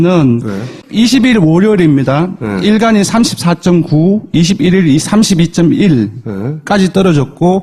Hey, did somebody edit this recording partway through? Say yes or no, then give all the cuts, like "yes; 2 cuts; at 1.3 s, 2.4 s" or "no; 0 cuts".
no; 0 cuts